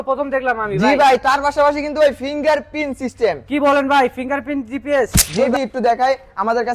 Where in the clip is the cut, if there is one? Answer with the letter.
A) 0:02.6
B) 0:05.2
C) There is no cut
B